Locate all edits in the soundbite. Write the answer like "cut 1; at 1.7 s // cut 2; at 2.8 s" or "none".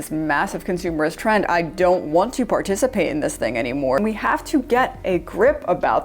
cut 1; at 1.4 s // cut 2; at 4.0 s